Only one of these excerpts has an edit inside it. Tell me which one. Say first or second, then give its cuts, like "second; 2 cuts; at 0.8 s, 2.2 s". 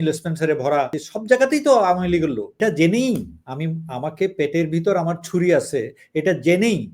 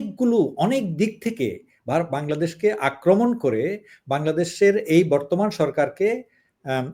first; 2 cuts; at 1.0 s, 2.6 s